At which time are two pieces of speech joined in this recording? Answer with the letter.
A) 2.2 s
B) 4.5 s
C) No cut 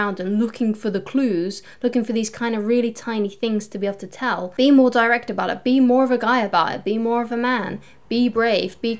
B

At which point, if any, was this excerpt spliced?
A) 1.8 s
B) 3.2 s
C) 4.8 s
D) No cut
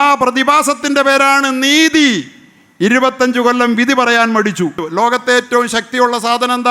C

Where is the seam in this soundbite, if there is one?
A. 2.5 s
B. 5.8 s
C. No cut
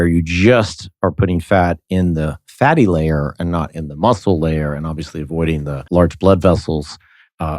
B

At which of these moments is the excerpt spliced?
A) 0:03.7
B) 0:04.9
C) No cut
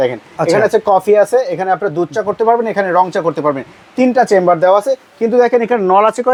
C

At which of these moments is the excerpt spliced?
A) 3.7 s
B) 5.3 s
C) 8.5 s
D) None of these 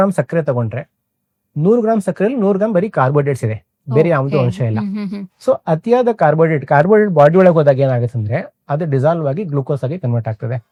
D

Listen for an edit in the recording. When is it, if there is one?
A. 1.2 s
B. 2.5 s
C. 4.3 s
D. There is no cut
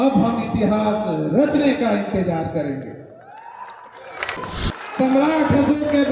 C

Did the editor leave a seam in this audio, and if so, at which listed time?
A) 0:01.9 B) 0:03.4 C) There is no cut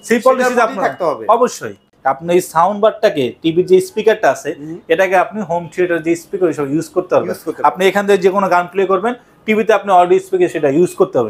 A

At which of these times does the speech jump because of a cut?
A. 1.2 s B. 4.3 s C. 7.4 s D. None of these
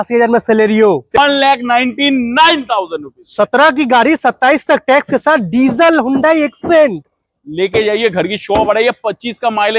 A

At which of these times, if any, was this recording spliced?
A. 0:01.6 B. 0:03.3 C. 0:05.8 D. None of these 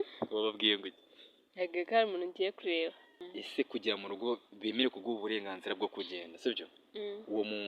B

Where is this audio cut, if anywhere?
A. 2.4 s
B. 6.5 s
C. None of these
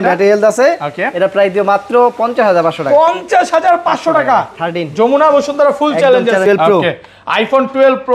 B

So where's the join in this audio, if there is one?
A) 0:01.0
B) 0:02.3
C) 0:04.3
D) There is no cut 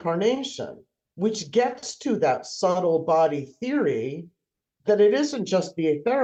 D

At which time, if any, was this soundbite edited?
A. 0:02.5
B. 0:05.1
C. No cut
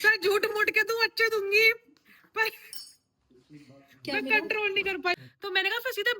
B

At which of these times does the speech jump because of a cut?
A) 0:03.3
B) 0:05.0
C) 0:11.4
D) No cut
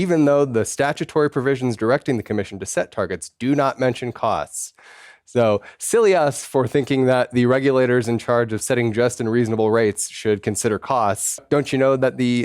C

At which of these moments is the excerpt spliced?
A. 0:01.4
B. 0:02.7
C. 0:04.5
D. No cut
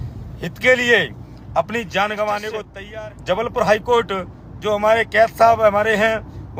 B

